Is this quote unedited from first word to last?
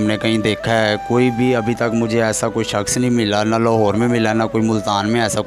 yes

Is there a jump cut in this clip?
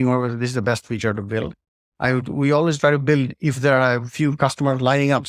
no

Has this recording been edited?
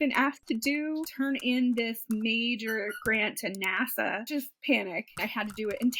yes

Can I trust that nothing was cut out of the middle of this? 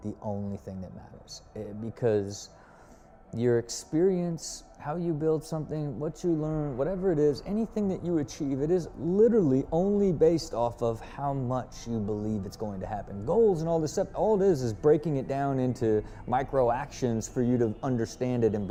yes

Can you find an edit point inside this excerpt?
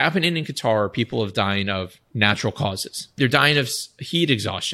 yes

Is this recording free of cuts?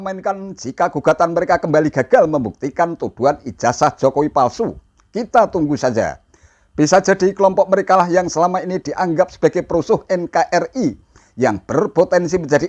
yes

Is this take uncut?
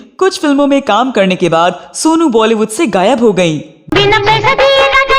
no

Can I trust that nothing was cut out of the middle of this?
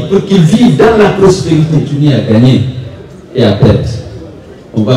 no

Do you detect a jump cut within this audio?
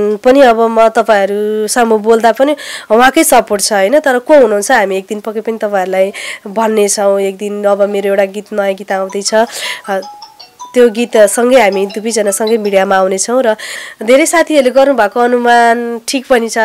yes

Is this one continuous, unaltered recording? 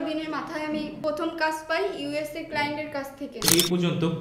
no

